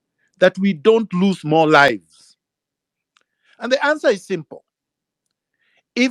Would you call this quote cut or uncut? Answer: uncut